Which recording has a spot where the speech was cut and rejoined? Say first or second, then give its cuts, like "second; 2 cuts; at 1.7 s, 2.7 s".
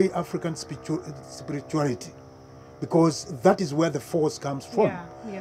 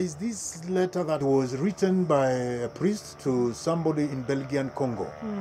second; 1 cut; at 1.2 s